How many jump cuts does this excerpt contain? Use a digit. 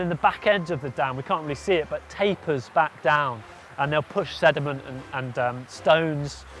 0